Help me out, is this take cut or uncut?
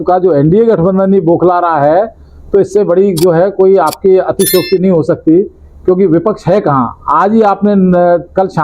uncut